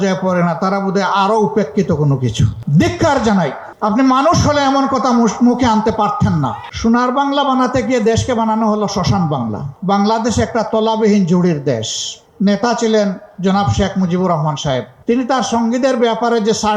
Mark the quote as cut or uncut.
cut